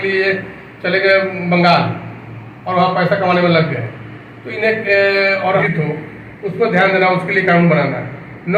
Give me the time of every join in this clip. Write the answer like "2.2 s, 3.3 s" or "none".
5.6 s